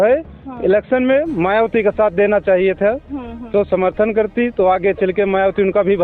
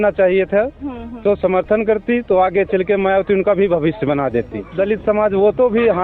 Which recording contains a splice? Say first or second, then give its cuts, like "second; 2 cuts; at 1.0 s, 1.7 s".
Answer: second; 1 cut; at 4.7 s